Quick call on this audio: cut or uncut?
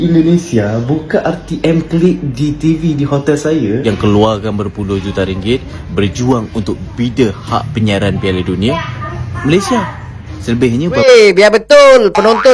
cut